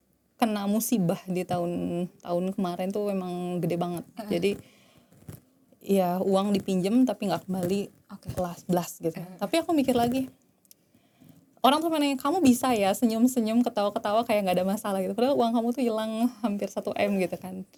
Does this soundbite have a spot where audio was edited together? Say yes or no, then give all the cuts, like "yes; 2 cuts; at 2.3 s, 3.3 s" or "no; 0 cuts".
no; 0 cuts